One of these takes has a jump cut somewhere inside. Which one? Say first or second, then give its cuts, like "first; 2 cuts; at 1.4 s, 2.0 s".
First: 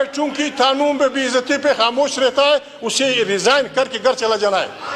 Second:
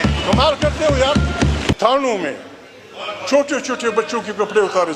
second; 1 cut; at 1.8 s